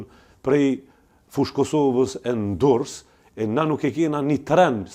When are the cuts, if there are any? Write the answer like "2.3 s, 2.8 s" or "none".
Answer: none